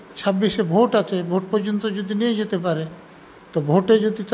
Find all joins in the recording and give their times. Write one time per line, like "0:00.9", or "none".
none